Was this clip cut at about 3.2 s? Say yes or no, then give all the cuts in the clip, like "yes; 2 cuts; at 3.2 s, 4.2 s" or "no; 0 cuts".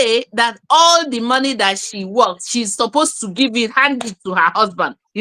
no; 0 cuts